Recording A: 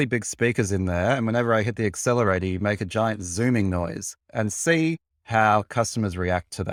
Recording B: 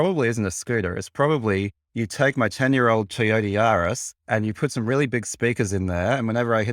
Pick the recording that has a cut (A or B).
B